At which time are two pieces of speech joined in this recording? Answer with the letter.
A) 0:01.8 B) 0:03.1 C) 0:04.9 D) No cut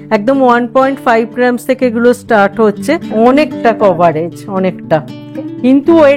B